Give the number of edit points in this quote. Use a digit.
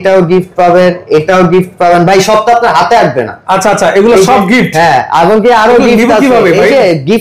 0